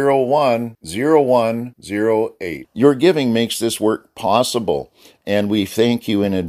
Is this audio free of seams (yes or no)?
yes